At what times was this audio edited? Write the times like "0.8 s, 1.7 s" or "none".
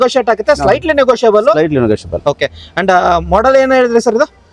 none